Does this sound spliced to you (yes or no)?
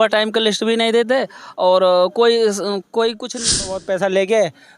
yes